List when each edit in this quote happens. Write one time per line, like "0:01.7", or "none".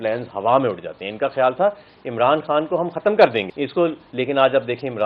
0:03.5

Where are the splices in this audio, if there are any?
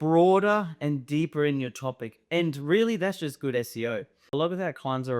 0:04.3

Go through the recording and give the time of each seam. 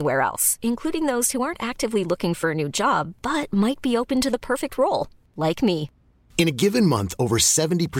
none

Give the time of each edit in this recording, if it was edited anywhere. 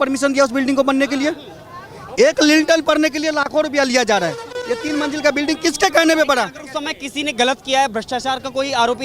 none

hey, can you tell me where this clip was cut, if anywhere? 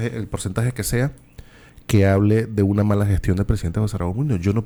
none

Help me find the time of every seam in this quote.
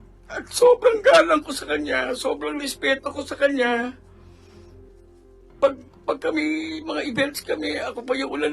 0:04.0
0:05.6

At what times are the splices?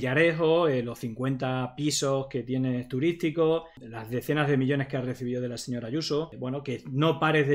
0:03.7

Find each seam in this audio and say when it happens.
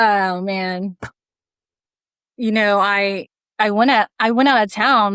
none

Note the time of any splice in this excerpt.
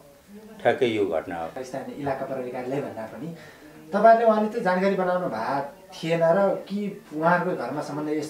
0:01.6

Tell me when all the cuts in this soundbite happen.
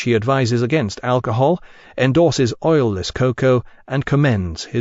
0:02.1

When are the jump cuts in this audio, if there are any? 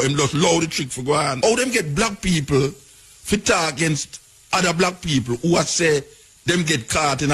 0:01.4

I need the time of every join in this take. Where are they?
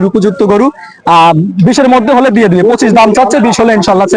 none

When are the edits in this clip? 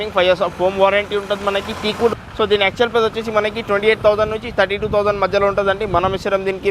0:02.1

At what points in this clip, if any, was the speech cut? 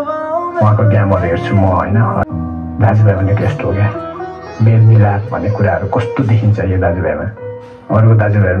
0:02.2

